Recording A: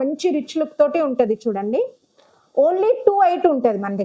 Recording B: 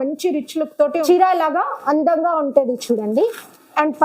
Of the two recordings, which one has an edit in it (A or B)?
B